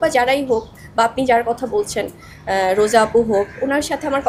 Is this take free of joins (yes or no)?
yes